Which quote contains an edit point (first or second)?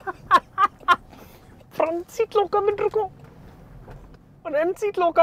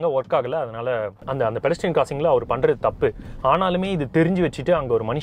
second